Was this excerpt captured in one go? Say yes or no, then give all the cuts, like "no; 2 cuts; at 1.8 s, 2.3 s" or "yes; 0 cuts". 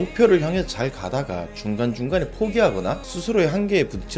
yes; 0 cuts